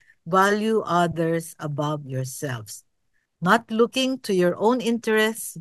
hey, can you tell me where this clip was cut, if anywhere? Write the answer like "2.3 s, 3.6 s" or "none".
none